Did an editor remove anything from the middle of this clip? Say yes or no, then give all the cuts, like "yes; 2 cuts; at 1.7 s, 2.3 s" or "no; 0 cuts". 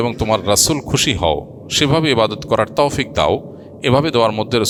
no; 0 cuts